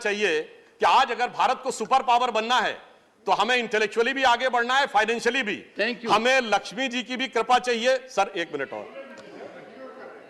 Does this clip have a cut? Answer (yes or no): no